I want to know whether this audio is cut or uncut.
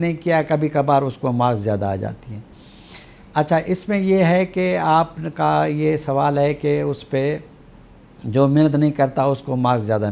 uncut